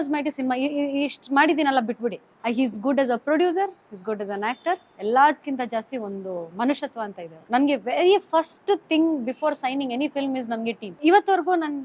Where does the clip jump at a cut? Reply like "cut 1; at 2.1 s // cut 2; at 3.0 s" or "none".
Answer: cut 1; at 2.3 s // cut 2; at 7.4 s // cut 3; at 10.8 s